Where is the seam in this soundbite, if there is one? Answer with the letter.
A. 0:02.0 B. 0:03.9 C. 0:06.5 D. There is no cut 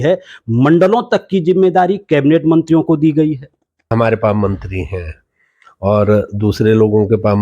B